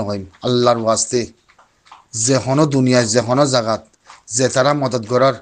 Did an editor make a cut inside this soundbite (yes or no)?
no